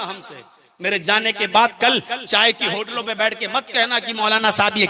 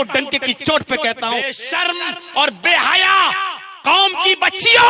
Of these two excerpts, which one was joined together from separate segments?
second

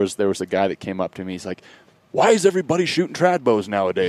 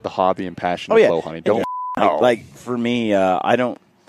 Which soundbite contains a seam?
second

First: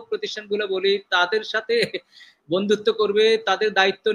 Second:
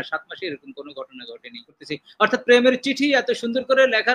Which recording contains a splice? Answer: second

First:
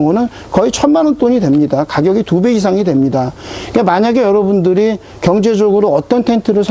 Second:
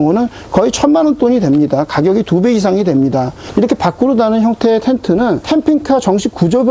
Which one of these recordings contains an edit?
second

